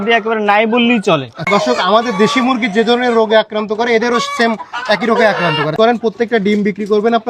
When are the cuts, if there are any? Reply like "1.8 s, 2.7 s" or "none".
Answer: 1.4 s, 5.7 s